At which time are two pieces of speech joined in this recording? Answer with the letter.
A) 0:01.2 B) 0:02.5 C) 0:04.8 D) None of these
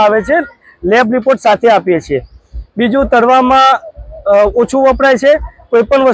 D